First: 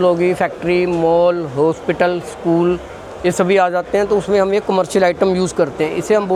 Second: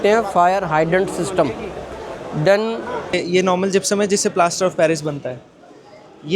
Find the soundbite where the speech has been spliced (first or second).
second